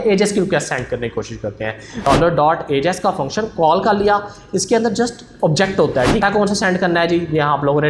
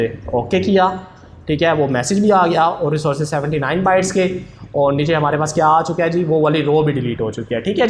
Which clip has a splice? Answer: first; 2 cuts; at 2.0 s, 6.2 s

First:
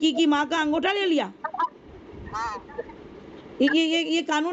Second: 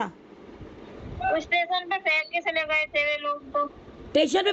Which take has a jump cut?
second; 1 cut; at 1.0 s

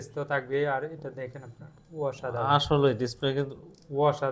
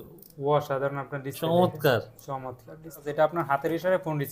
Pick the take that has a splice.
second; 1 cut; at 3.1 s

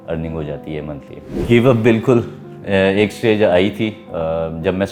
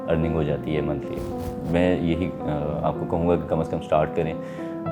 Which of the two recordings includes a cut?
second; 1 cut; at 1.2 s

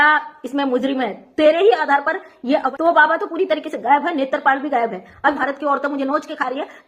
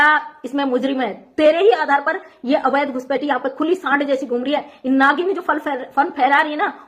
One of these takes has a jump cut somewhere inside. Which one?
first; 2 cuts; at 2.7 s, 5.4 s

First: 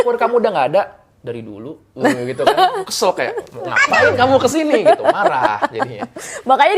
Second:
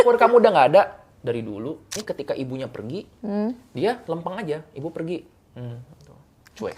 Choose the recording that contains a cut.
second; 1 cut; at 1.8 s

